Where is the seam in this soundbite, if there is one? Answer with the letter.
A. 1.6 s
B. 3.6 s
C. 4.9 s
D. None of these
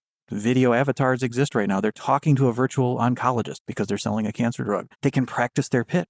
C